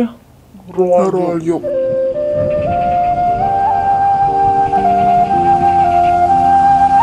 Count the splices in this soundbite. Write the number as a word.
zero